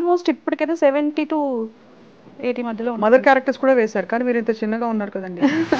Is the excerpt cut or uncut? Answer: uncut